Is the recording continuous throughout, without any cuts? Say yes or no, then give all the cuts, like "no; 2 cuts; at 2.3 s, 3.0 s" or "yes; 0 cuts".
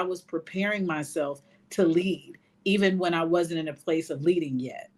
yes; 0 cuts